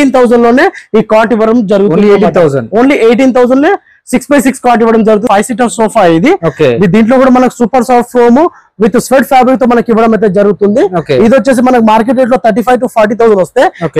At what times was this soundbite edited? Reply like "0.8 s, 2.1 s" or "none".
5.2 s

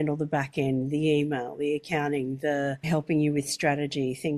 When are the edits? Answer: 2.9 s

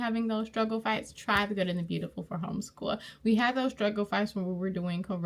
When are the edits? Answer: none

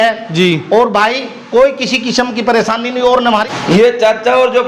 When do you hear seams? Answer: 3.5 s

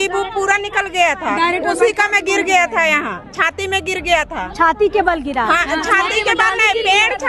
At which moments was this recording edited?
none

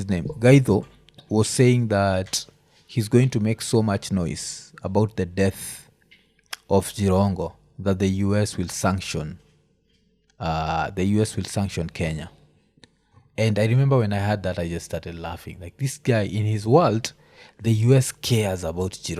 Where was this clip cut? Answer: none

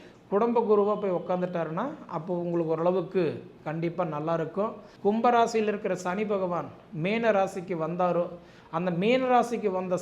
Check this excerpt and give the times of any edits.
4.8 s

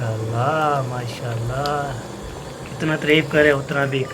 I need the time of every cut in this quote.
none

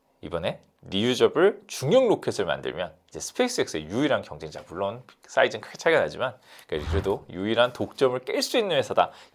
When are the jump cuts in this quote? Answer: none

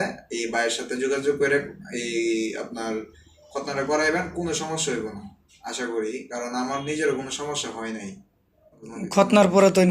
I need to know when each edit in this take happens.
8.9 s

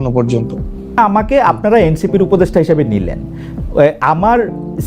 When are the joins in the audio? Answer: 0.9 s

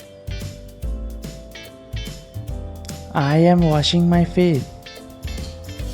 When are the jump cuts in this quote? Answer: 1.0 s, 2.6 s, 4.8 s

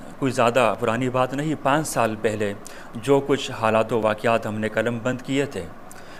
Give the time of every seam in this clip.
none

